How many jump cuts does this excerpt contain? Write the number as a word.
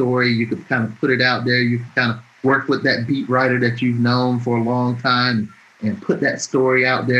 zero